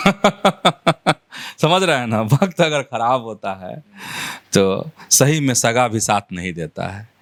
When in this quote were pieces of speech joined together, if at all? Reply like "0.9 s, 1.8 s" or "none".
none